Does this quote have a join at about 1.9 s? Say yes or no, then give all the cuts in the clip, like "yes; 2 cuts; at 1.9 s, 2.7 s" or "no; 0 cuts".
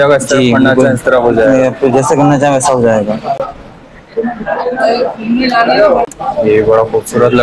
no; 1 cut; at 6.1 s